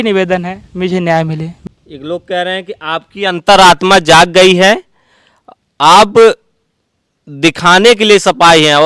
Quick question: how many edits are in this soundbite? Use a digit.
1